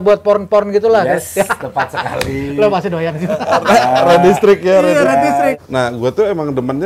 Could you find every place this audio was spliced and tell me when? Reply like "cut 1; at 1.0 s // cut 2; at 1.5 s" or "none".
cut 1; at 5.5 s